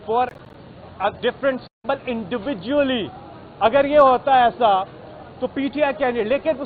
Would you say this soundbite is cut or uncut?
uncut